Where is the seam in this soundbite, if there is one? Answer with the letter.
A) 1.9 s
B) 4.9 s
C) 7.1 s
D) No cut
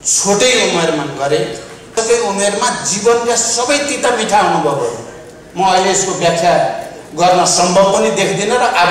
A